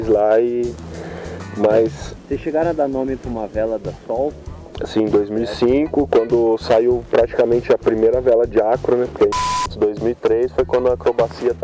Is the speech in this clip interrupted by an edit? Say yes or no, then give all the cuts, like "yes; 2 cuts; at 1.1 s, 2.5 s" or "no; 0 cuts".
yes; 1 cut; at 9.4 s